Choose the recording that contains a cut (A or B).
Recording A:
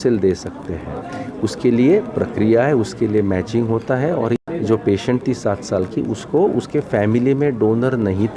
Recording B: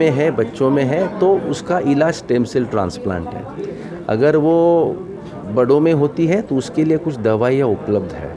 A